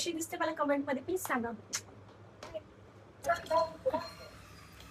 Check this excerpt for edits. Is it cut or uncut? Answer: uncut